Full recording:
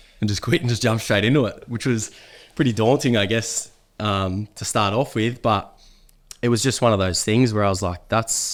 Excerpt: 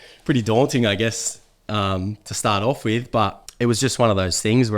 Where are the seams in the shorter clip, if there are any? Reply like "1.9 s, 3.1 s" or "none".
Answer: 3.4 s